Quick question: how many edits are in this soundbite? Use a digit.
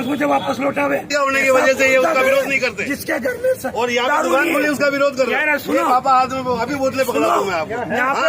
1